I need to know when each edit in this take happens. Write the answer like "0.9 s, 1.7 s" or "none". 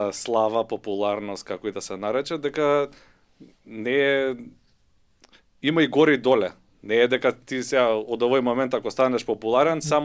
none